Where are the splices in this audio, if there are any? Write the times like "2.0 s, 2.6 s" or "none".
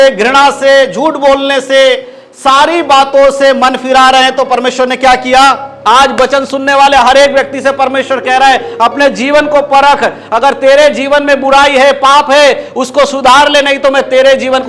5.7 s